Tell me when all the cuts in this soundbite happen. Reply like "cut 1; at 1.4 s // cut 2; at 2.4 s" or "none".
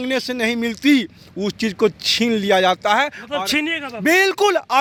none